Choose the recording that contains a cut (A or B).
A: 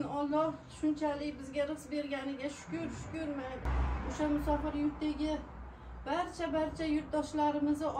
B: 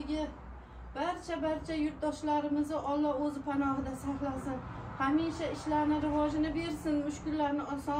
A